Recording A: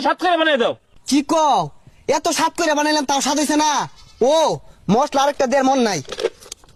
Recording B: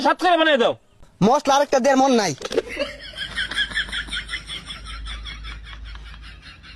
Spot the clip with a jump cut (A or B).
B